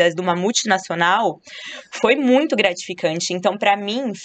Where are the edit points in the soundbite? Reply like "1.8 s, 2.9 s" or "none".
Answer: none